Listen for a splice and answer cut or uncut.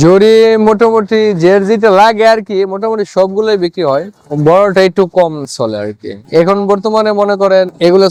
uncut